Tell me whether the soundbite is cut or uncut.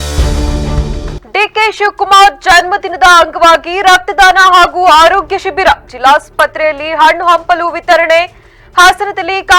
cut